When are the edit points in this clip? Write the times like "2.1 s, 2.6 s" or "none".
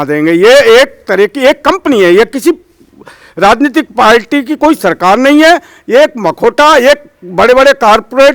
none